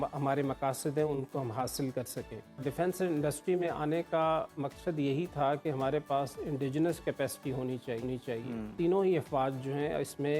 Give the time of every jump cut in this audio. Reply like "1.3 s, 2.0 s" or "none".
2.6 s, 8.7 s